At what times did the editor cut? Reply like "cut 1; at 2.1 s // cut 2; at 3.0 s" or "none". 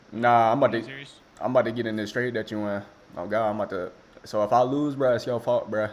none